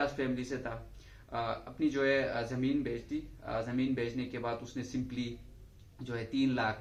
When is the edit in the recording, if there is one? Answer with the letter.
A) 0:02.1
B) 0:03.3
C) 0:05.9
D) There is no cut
D